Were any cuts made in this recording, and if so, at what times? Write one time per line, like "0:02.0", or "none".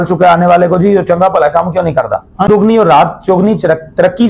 0:02.5